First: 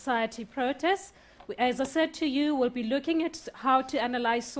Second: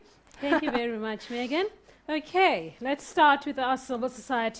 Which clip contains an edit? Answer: second; 1 cut; at 2.6 s

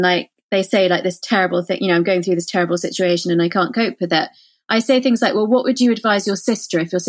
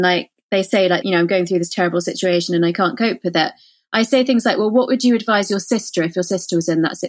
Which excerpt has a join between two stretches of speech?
second; 1 cut; at 1.0 s

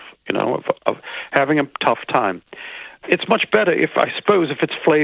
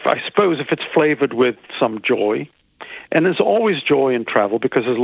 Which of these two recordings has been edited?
first; 1 cut; at 2.9 s

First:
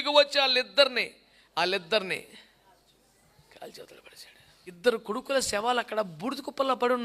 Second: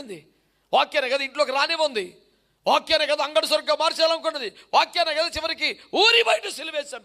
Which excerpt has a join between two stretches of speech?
first; 1 cut; at 4.8 s

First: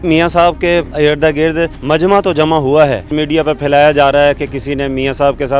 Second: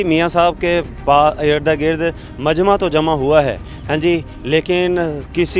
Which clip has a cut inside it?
first; 3 cuts; at 0.9 s, 1.8 s, 3.1 s

